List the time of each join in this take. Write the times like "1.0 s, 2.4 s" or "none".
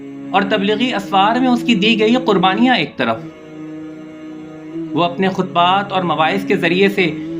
3.2 s, 4.9 s